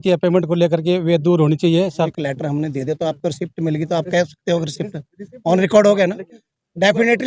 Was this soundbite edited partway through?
yes; 1 cut; at 2.1 s

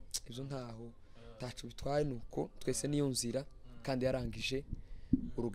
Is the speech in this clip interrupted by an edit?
no; 0 cuts

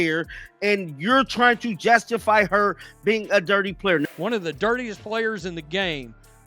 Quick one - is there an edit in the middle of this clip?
yes; 1 cut; at 4.1 s

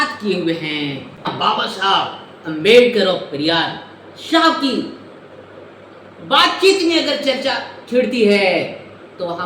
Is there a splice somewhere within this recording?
yes; 1 cut; at 1.3 s

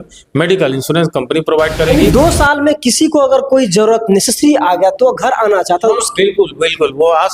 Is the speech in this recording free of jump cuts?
no; 1 cut; at 1.9 s

